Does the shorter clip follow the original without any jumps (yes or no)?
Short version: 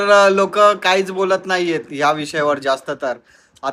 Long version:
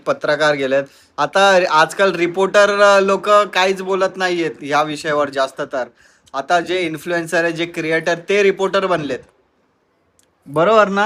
yes